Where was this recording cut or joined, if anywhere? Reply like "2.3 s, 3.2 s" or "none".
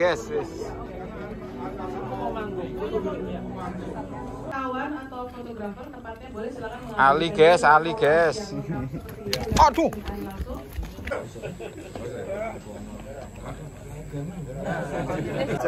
none